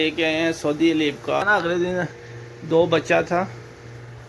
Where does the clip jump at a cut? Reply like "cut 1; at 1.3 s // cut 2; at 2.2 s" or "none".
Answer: cut 1; at 1.4 s